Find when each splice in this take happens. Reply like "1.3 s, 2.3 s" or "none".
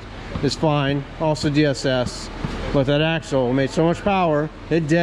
none